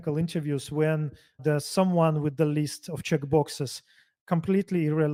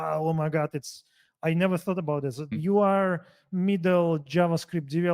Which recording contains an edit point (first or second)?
second